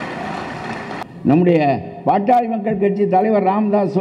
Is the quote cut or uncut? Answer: cut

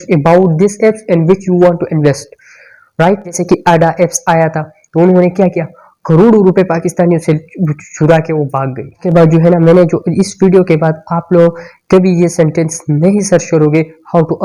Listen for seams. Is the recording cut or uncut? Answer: cut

